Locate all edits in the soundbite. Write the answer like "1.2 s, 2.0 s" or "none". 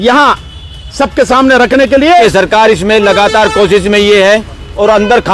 2.7 s